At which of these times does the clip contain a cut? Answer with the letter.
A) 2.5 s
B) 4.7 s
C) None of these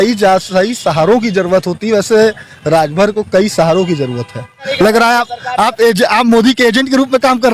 B